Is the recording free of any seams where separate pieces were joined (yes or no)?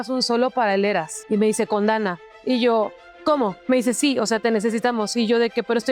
no